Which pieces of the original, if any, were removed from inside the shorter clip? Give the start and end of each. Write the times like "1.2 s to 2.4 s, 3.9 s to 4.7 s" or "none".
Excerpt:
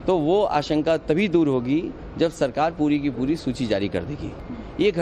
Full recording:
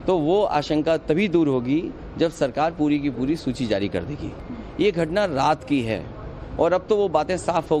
none